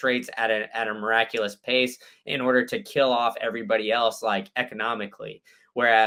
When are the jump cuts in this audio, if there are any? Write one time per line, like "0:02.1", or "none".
none